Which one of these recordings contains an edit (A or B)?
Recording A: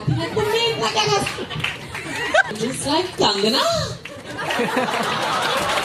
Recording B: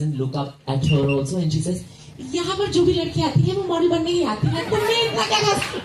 A